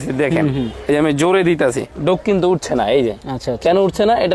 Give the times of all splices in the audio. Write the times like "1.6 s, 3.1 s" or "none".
none